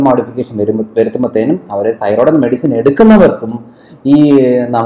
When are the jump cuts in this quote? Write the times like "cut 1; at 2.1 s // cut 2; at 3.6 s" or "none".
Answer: none